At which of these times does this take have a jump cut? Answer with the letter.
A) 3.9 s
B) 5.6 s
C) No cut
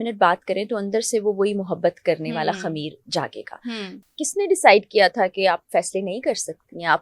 A